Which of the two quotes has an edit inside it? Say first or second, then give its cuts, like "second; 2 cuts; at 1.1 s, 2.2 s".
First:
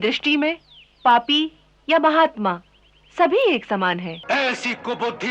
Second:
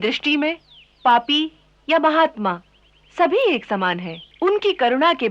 first; 1 cut; at 4.1 s